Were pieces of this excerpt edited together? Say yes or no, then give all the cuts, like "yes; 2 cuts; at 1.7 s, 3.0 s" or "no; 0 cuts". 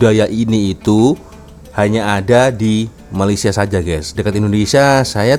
no; 0 cuts